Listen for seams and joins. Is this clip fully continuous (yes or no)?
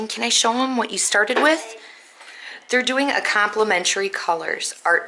yes